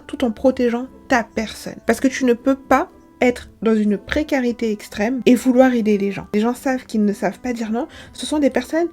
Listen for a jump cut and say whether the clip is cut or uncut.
cut